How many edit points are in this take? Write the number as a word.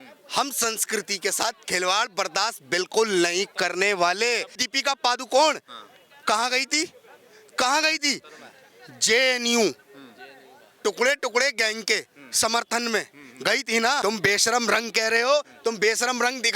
two